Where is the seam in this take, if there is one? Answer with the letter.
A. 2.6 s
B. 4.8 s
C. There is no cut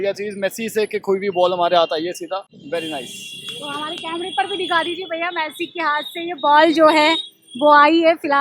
A